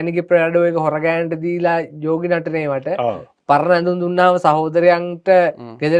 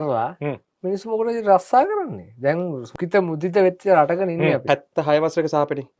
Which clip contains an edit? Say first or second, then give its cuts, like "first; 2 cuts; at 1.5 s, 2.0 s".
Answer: second; 2 cuts; at 2.9 s, 4.6 s